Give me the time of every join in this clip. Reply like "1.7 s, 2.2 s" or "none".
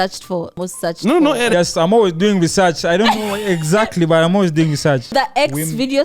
1.5 s, 5.1 s